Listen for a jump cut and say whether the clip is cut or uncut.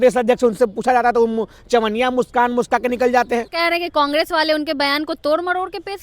cut